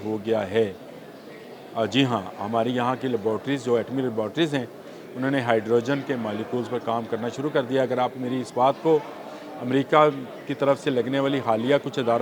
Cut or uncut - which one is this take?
uncut